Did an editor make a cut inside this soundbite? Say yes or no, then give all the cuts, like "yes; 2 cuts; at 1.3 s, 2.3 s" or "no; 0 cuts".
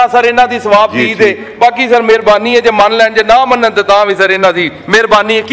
no; 0 cuts